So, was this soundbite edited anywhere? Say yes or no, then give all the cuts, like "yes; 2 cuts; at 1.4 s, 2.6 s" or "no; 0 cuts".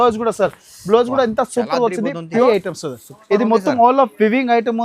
yes; 1 cut; at 2.4 s